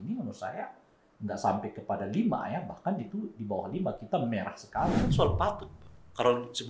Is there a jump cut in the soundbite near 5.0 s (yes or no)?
yes